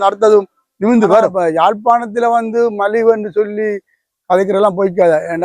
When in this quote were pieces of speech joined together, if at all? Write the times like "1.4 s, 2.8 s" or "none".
1.3 s